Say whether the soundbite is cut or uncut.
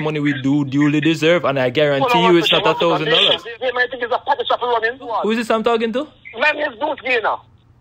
cut